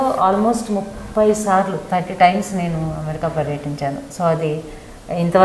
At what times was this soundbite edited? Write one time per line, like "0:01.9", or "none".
none